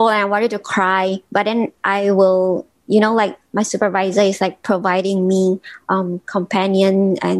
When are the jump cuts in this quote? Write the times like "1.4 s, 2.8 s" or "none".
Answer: none